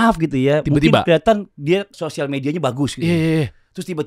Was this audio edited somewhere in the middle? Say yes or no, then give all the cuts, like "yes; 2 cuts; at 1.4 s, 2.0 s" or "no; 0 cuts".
yes; 1 cut; at 1.9 s